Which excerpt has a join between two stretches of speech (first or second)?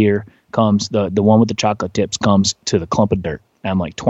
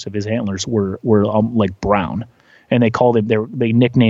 first